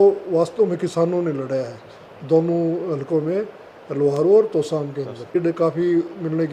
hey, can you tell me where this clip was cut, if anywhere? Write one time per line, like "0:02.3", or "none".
0:05.4